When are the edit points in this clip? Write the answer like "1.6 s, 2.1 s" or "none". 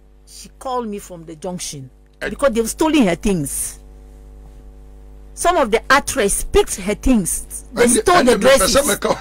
2.3 s